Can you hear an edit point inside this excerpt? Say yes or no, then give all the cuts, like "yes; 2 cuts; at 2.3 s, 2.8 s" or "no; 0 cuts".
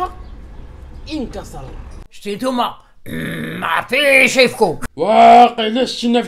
yes; 1 cut; at 2.1 s